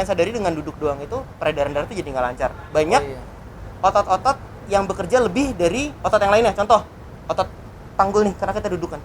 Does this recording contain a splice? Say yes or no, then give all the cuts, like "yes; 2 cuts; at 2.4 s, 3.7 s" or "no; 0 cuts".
no; 0 cuts